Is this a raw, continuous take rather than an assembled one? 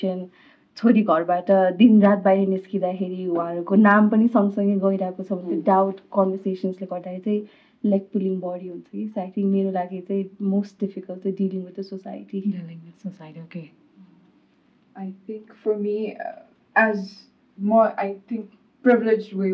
yes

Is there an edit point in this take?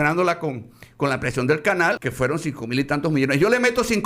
yes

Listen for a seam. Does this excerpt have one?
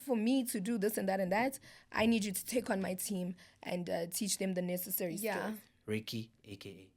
yes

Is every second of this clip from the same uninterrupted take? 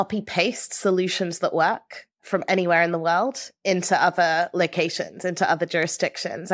yes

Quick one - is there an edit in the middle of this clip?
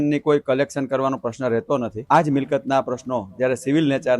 yes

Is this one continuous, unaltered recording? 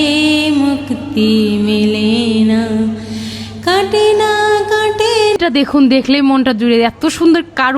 no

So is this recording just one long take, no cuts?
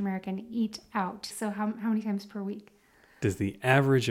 no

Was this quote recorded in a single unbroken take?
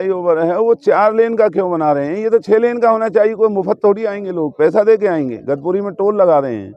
yes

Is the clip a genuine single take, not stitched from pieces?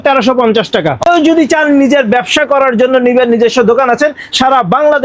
no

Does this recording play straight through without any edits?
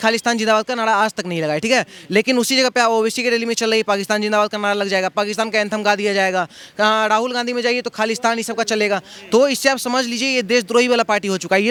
yes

